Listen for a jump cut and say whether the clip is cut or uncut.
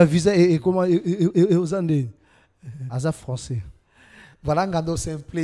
uncut